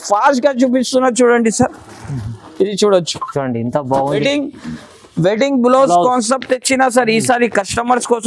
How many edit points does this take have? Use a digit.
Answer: 1